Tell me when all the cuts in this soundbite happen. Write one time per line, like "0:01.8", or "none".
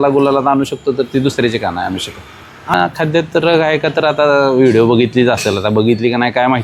0:02.7